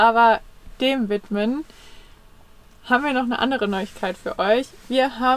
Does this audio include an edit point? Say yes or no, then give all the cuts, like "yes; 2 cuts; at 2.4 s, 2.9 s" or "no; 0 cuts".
no; 0 cuts